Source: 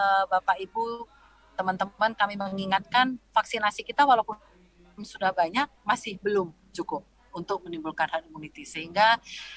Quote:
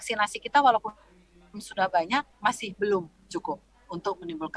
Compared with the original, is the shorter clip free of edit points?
yes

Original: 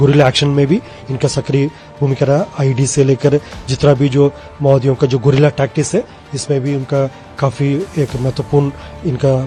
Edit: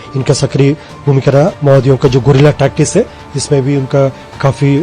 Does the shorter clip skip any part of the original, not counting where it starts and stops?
yes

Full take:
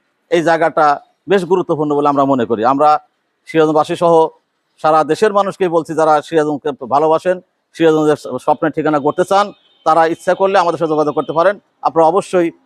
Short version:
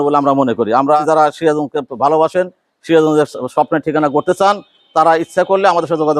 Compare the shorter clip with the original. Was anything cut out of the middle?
yes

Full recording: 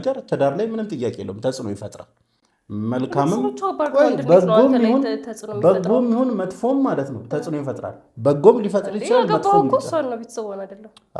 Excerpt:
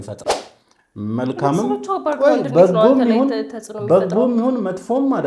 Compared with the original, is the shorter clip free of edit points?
yes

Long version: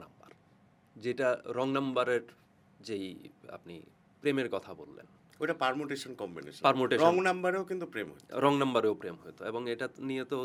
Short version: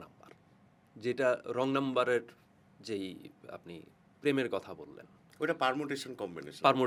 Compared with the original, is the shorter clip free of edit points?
yes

